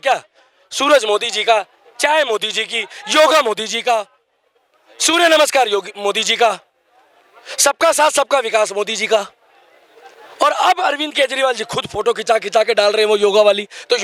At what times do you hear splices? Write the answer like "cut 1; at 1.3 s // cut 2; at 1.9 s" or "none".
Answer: none